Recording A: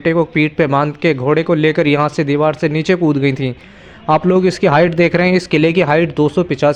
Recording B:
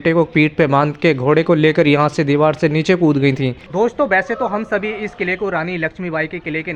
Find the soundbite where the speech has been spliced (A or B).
B